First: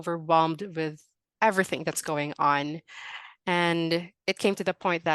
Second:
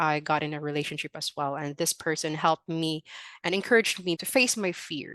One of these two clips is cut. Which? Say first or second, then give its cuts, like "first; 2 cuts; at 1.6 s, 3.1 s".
first; 1 cut; at 4.1 s